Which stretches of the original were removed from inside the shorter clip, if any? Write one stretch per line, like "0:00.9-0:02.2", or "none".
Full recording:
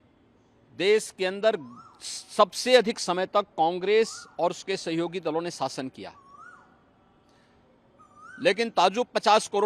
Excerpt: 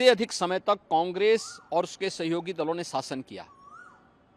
none